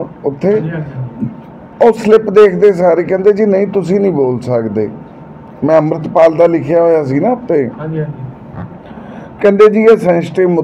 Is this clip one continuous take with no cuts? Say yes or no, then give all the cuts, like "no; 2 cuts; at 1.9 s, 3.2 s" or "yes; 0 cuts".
yes; 0 cuts